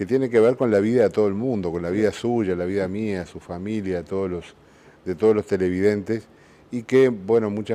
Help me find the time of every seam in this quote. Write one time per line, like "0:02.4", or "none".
0:02.3